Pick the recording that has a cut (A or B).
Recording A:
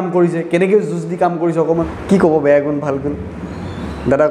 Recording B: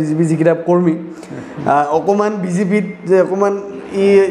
A